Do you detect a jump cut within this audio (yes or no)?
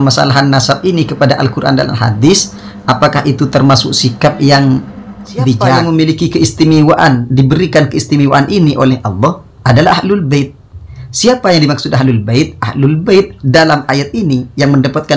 yes